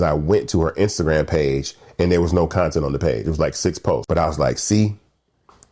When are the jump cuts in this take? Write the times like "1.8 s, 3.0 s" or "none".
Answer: 4.0 s